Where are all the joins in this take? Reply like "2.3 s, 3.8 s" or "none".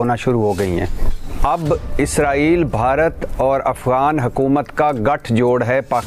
none